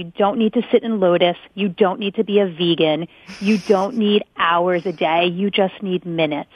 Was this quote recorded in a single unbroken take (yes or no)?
no